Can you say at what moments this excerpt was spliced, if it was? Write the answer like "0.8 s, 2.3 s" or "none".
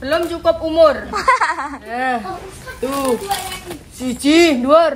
1.9 s